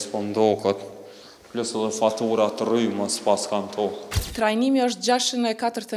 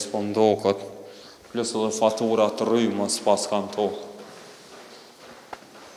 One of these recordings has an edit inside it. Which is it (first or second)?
first